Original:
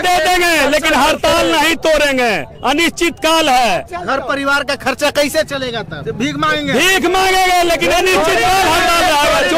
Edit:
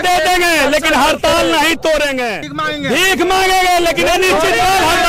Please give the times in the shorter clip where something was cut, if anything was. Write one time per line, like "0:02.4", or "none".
0:02.5